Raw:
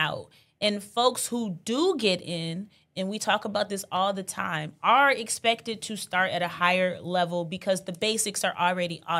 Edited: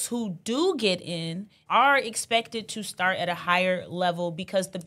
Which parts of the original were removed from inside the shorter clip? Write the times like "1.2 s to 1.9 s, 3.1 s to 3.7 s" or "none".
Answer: 2.7 s to 4.7 s